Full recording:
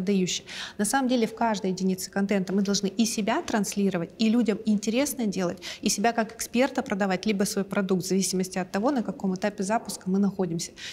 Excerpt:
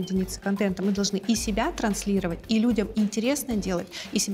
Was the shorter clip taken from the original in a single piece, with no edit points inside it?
yes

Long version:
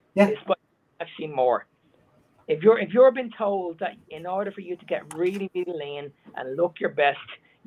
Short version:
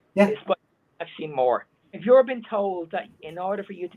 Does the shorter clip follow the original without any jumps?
no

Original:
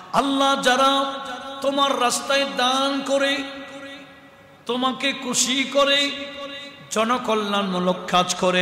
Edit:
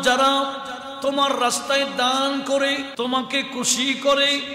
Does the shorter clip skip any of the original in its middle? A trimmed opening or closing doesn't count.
yes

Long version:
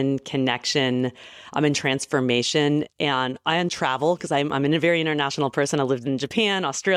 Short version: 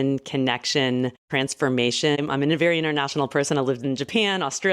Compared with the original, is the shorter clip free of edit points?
no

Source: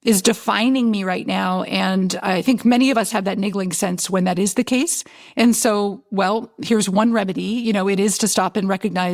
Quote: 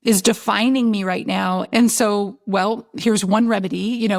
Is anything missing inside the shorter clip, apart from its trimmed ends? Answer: yes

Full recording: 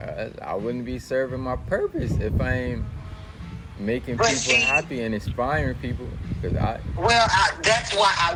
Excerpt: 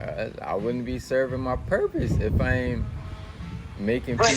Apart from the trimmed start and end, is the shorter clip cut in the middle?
no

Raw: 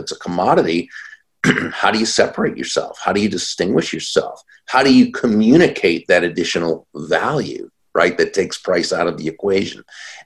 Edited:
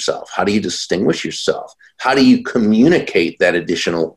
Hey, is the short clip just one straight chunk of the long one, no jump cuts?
yes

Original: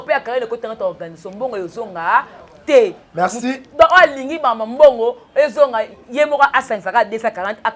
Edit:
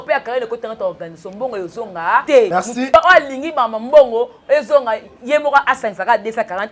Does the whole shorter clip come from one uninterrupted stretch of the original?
no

